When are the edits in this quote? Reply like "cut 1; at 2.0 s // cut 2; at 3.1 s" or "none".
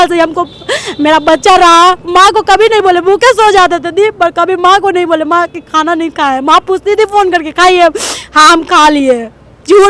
none